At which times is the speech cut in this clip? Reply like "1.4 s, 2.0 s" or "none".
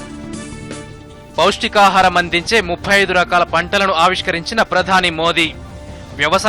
0.9 s